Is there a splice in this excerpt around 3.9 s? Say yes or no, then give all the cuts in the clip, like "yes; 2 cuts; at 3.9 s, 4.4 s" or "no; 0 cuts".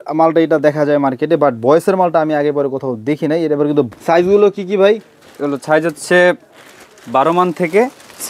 yes; 1 cut; at 3.9 s